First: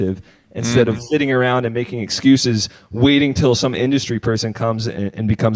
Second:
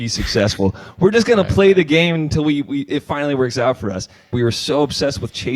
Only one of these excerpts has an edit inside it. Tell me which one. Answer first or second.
second